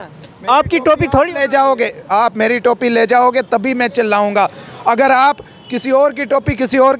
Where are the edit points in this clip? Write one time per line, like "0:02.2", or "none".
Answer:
none